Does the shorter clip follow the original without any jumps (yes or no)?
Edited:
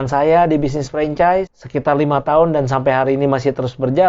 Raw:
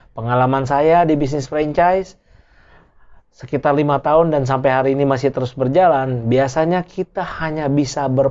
no